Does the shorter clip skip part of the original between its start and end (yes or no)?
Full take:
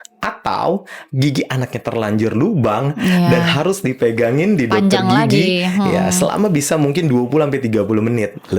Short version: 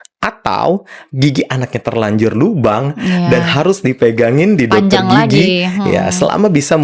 no